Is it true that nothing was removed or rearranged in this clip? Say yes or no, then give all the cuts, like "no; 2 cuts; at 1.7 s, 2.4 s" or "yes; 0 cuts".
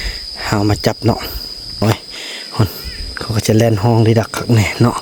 no; 1 cut; at 1.8 s